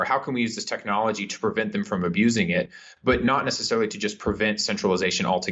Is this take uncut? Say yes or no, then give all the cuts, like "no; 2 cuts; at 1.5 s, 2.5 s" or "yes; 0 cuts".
yes; 0 cuts